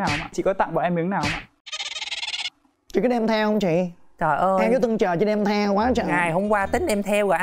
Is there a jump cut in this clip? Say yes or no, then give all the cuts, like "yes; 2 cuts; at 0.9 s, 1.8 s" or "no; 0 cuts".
no; 0 cuts